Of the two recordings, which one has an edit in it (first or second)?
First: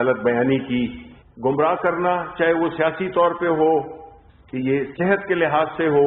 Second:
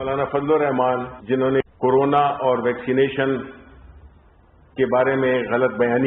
second